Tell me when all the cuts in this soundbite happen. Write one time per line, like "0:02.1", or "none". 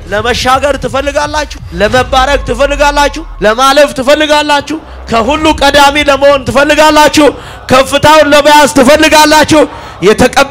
0:01.6
0:03.2